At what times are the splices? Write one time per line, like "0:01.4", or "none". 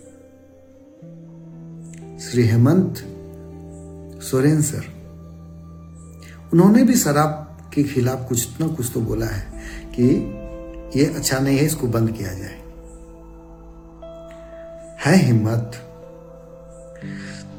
none